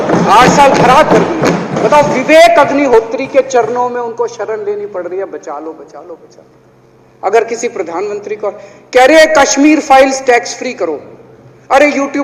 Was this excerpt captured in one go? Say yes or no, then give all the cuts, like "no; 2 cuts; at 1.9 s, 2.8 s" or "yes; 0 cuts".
yes; 0 cuts